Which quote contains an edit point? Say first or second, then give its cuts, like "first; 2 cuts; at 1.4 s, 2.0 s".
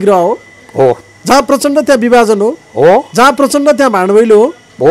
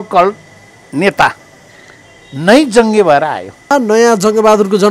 second; 1 cut; at 3.7 s